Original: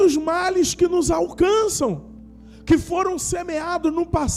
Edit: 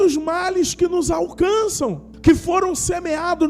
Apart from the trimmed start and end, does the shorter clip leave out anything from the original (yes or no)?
yes